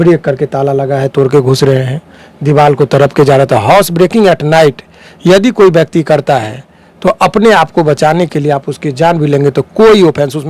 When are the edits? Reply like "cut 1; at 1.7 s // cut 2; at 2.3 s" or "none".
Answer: none